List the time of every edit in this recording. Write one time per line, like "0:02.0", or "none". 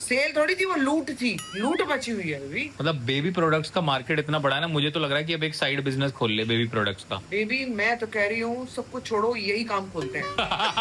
none